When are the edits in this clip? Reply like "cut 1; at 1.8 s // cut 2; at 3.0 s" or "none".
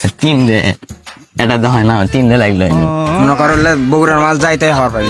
cut 1; at 2.9 s